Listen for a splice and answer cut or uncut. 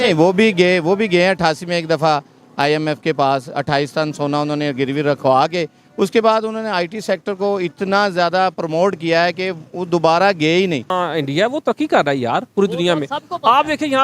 cut